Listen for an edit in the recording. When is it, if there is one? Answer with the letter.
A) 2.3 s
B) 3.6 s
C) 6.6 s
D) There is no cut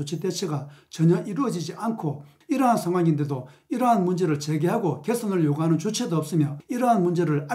A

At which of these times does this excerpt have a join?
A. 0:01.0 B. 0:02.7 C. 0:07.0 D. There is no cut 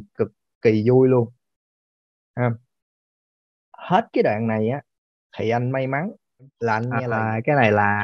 C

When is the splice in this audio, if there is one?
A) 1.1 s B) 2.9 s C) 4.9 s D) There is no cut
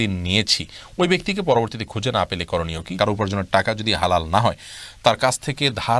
B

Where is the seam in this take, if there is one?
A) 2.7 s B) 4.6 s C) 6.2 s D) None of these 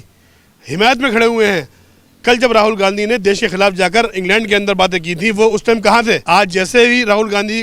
C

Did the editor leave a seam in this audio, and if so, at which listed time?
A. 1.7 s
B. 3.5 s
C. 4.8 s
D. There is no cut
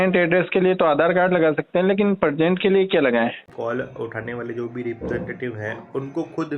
B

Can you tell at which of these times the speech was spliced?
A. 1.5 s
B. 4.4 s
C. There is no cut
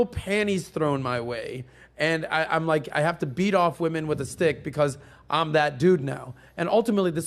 C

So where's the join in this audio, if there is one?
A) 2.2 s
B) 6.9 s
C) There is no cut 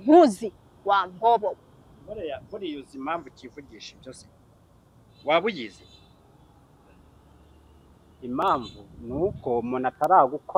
C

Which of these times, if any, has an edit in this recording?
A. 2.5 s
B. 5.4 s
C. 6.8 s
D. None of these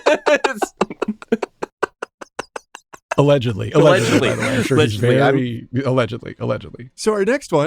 C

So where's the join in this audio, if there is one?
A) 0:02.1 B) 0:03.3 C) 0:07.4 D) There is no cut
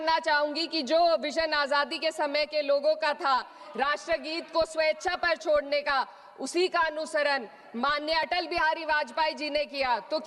D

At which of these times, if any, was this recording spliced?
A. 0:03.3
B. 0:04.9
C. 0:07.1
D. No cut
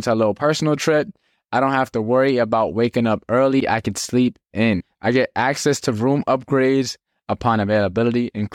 B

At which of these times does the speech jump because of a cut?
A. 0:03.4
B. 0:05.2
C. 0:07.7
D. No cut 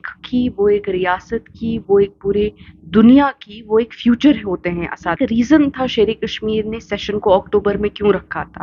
B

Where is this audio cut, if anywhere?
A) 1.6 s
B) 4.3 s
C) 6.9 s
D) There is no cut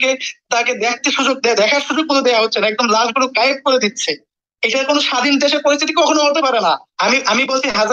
C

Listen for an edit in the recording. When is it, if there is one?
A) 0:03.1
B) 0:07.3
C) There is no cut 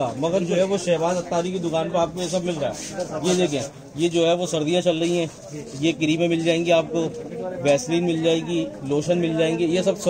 C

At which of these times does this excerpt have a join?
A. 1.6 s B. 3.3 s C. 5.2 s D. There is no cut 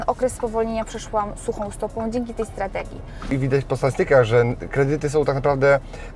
B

